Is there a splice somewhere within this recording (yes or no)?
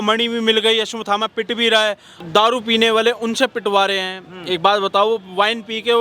yes